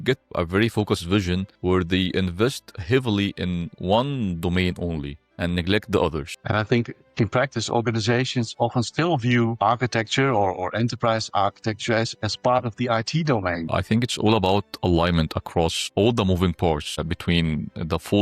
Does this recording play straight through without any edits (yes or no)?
no